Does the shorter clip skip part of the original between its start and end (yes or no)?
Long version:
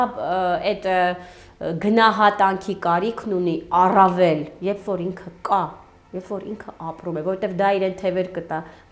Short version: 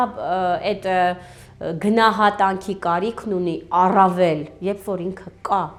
no